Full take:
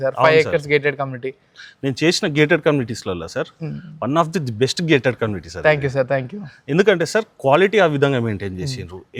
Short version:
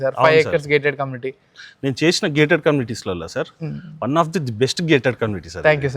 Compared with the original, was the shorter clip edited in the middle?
no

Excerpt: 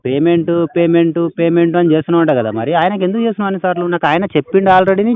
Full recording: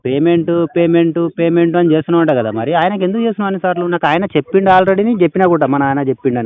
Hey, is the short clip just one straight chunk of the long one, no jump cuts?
yes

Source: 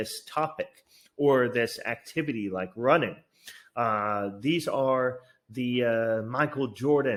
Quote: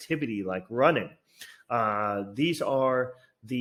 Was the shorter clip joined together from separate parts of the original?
no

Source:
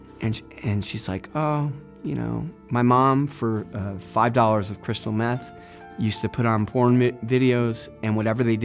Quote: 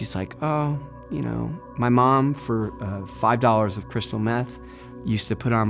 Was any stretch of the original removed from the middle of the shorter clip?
no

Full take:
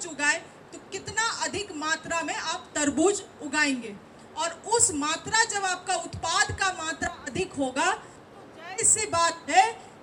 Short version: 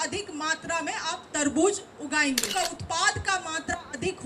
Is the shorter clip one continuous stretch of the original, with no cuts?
no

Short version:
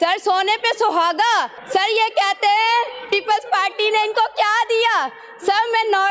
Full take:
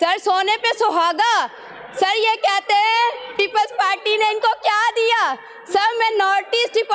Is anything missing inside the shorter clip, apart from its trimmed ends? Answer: yes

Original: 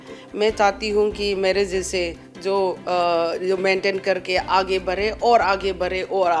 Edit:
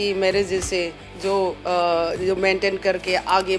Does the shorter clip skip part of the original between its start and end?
no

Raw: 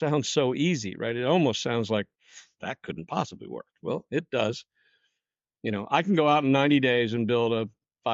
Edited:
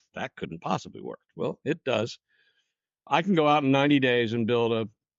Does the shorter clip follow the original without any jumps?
no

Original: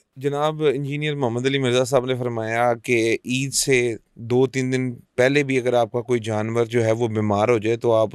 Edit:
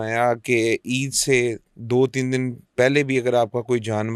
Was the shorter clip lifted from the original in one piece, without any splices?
yes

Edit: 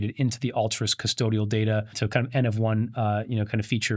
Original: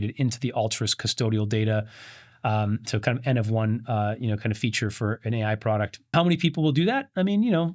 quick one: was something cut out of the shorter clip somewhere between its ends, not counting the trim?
yes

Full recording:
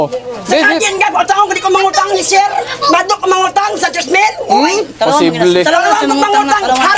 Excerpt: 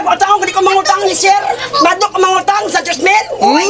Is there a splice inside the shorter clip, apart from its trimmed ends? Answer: no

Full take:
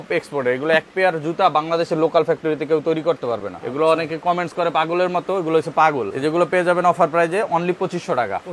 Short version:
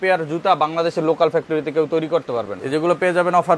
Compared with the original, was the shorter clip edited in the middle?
yes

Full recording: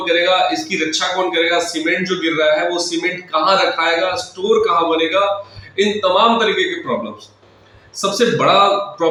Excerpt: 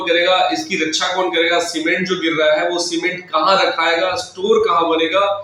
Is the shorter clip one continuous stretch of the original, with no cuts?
yes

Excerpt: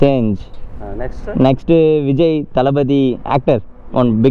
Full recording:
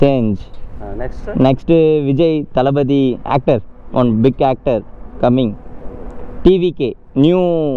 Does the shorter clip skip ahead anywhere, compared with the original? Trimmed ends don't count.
no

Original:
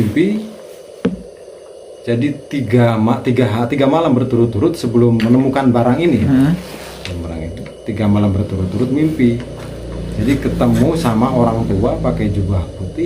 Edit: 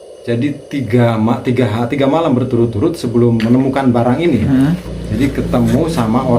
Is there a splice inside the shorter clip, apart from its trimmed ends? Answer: yes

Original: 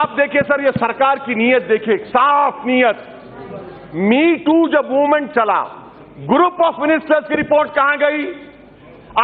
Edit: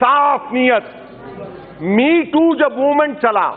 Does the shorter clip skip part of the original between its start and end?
no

